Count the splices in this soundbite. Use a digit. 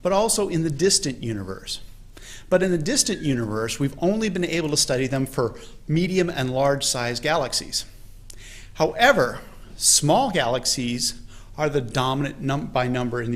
1